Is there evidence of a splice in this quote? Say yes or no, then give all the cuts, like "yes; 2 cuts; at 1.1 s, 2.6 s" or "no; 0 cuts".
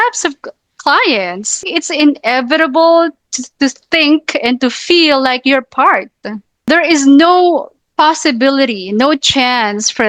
yes; 2 cuts; at 1.6 s, 6.7 s